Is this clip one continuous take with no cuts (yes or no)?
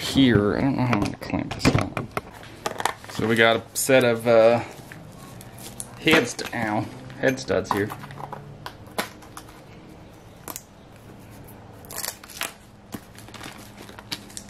no